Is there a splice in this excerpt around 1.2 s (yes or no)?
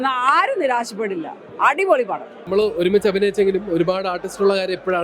no